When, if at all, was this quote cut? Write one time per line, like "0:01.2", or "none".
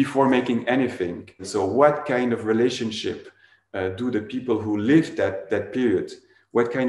0:01.4